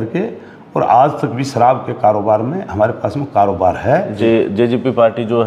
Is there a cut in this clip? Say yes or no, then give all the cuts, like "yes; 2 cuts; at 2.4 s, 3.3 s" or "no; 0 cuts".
yes; 1 cut; at 4.2 s